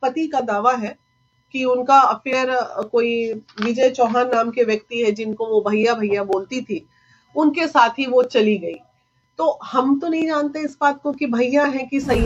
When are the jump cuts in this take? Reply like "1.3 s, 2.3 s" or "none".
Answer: none